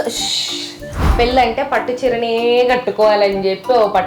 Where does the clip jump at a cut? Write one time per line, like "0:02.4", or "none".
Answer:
0:01.1